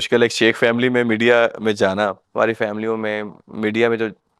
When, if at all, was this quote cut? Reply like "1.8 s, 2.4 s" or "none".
2.2 s